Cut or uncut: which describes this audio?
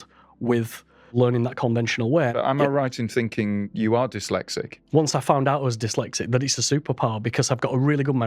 cut